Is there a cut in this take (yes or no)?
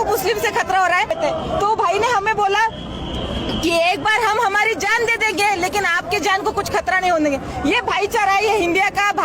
yes